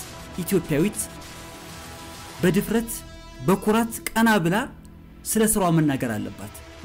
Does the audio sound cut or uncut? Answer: uncut